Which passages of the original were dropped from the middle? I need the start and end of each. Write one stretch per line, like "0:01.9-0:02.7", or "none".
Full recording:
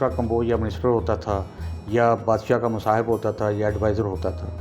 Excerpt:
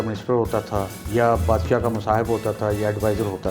0:01.5-0:01.8